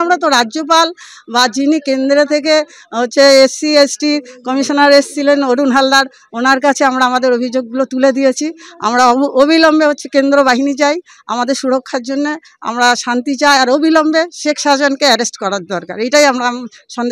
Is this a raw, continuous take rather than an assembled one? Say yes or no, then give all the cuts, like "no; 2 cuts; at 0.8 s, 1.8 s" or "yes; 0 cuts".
yes; 0 cuts